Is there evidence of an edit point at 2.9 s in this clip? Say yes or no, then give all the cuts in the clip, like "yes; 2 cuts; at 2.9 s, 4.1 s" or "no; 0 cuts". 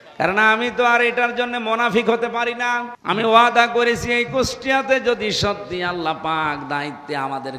yes; 1 cut; at 2.9 s